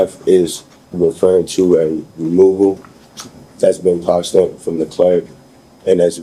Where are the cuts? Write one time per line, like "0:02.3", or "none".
none

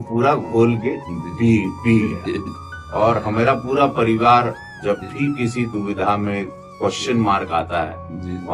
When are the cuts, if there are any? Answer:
none

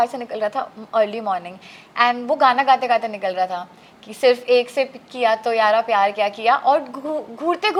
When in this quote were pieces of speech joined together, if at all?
none

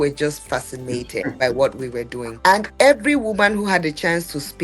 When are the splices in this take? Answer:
0:01.3
0:02.2

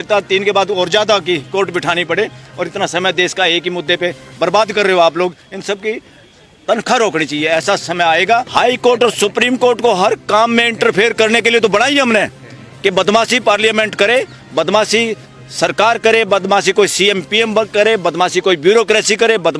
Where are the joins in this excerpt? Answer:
0:08.5

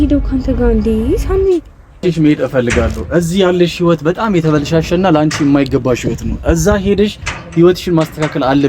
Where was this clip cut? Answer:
0:02.0

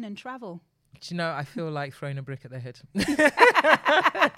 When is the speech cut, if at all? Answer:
none

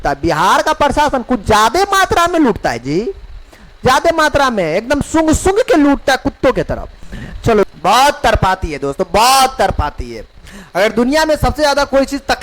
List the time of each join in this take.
0:07.6

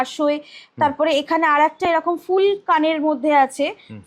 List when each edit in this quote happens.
none

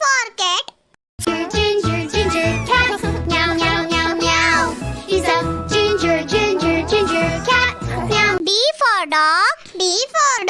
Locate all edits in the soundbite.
0:08.4

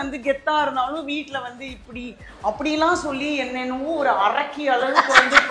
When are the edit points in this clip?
none

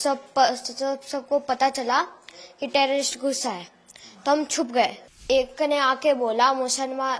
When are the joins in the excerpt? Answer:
0:05.2

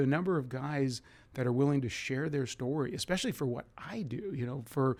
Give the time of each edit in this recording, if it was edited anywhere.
none

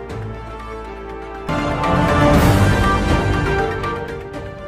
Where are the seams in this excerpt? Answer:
0:01.1

